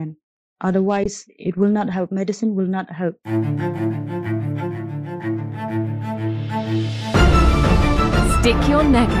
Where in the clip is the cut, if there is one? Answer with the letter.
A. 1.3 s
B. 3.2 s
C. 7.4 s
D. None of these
B